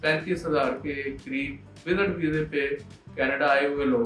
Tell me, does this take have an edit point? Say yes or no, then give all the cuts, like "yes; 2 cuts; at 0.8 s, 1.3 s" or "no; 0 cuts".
no; 0 cuts